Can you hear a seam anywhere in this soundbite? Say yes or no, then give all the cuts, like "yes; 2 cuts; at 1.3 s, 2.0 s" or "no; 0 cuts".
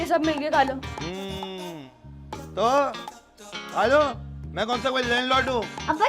no; 0 cuts